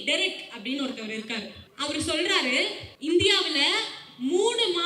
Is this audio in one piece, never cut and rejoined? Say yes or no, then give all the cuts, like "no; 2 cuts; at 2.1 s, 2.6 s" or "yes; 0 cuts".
no; 2 cuts; at 1.6 s, 2.9 s